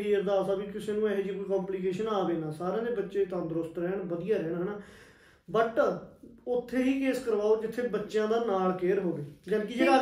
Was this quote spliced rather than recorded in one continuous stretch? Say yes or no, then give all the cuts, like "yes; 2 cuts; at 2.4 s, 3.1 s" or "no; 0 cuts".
no; 0 cuts